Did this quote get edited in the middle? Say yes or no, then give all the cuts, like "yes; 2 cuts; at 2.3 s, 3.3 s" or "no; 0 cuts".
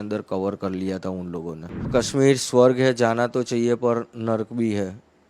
yes; 1 cut; at 1.9 s